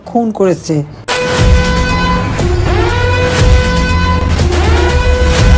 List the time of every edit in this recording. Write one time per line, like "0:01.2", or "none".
0:01.0